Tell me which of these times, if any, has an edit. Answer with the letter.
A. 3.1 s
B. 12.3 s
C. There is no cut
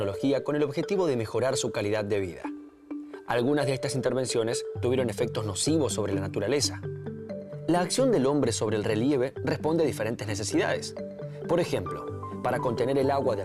A